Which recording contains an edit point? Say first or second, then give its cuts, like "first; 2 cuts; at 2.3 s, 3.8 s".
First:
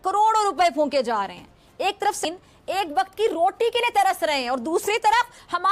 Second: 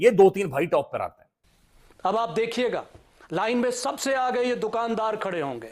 second; 1 cut; at 1.3 s